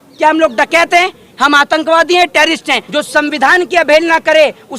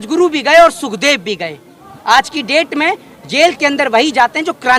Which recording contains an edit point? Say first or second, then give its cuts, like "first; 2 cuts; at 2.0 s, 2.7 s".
first; 1 cut; at 2.8 s